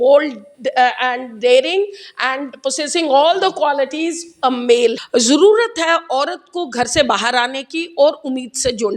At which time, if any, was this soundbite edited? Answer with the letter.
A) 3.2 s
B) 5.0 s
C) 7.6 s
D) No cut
B